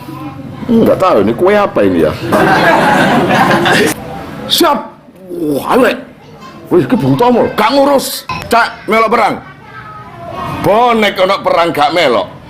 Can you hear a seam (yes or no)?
yes